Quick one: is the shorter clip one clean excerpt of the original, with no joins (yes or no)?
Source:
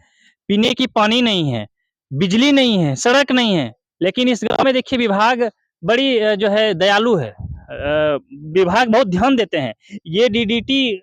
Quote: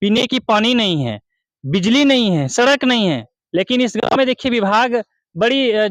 yes